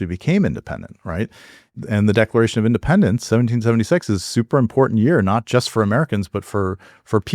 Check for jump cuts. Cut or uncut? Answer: cut